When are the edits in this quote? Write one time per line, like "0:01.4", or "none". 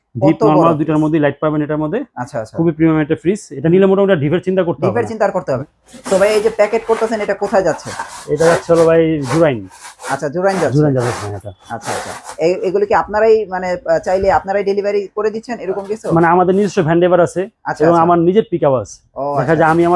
0:05.6